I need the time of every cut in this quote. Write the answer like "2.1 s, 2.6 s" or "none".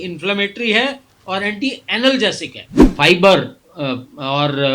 2.6 s